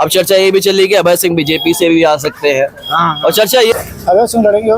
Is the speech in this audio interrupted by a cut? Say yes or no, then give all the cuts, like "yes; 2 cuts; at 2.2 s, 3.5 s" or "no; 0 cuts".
yes; 1 cut; at 3.7 s